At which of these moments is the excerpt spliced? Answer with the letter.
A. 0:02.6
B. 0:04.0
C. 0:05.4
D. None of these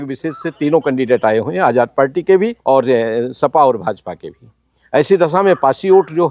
A